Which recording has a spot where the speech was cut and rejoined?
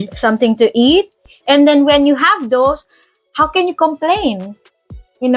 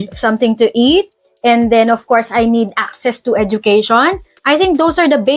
first; 1 cut; at 1.3 s

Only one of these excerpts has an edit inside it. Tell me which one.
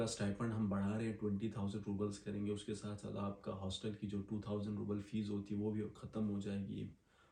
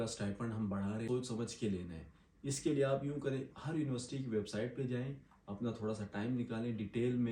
second; 1 cut; at 1.1 s

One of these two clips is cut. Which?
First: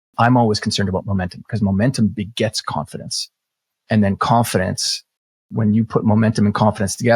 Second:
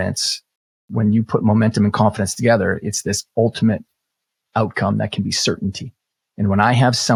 first; 2 cuts; at 1.0 s, 3.2 s

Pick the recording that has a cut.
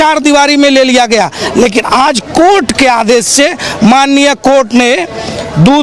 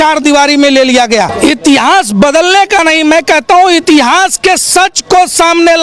second; 1 cut; at 1.3 s

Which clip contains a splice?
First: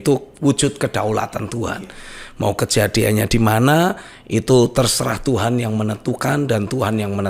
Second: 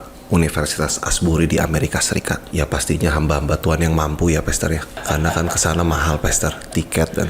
second; 2 cuts; at 2.4 s, 4.9 s

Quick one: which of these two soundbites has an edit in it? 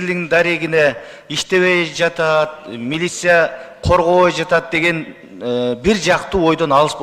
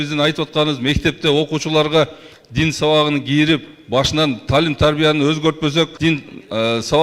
second; 1 cut; at 5.9 s

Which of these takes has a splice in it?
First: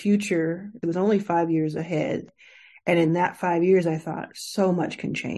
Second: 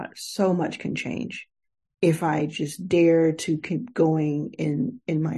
first; 2 cuts; at 0.8 s, 2.3 s

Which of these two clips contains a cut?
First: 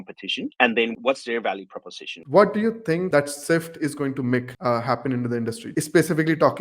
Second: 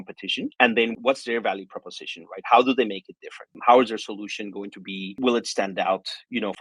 first; 3 cuts; at 2.1 s, 3.1 s, 5.7 s

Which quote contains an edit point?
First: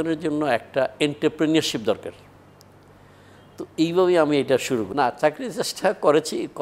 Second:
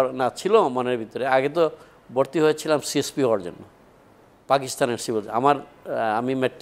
first; 1 cut; at 4.9 s

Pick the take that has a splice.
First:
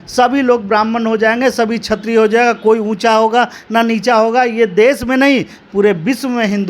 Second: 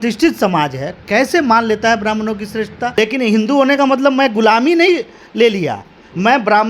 second; 1 cut; at 2.9 s

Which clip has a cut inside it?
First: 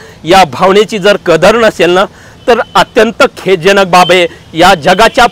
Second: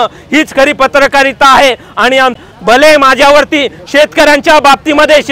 second; 1 cut; at 2.4 s

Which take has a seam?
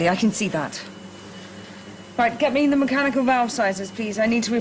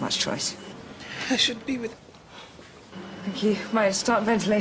second; 1 cut; at 1.9 s

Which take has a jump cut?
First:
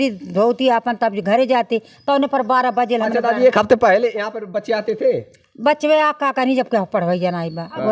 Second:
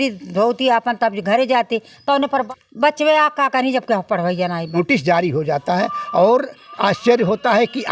second; 2 cuts; at 2.4 s, 4.8 s

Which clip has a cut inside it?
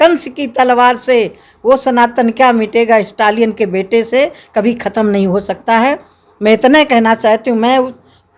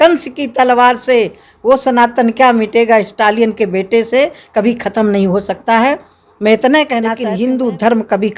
second; 1 cut; at 7.1 s

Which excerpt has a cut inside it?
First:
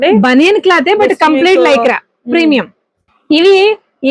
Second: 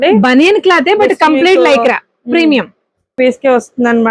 second; 1 cut; at 3.1 s

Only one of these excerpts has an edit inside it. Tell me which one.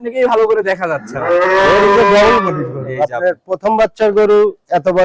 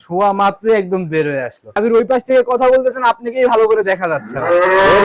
second; 1 cut; at 1.8 s

